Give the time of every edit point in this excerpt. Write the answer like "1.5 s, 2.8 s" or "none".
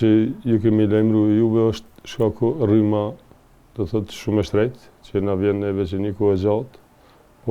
none